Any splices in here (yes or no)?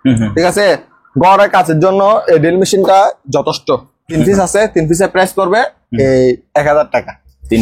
yes